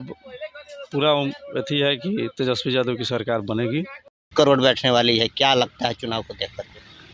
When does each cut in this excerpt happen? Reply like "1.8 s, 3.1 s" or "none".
4.3 s

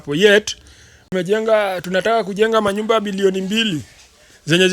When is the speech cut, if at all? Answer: 1.1 s

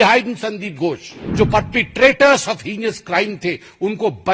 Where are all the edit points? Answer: 1.2 s

